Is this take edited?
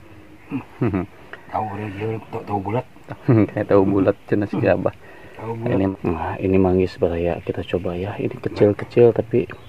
yes; 1 cut; at 5.9 s

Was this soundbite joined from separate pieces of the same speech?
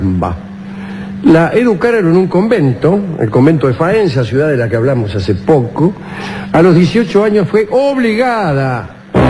no; 0 cuts

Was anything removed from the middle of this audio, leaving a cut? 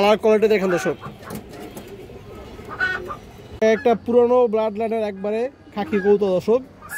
no; 0 cuts

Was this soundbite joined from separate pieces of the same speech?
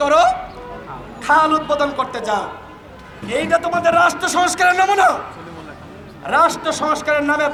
no; 0 cuts

